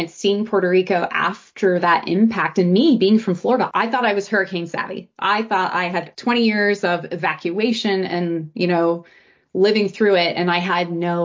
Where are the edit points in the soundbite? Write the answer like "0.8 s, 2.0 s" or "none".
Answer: 3.7 s, 6.1 s